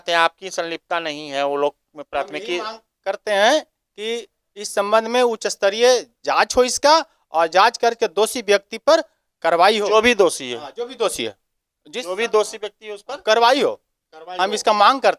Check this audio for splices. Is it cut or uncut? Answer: uncut